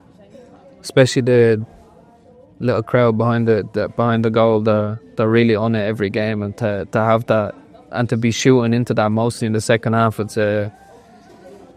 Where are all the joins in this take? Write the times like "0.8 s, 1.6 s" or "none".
none